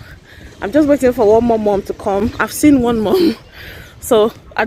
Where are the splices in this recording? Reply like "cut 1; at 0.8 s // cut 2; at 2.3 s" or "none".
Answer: none